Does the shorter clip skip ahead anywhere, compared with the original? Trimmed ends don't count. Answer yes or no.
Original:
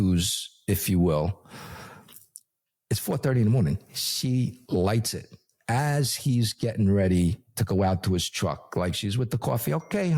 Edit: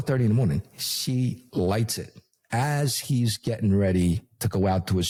no